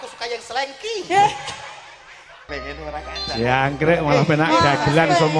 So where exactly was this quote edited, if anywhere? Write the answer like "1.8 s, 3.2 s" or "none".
2.5 s

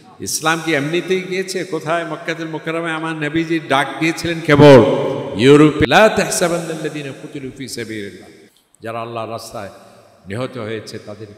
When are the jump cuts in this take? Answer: 5.8 s

